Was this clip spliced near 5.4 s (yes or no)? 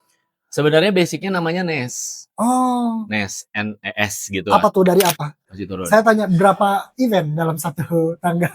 yes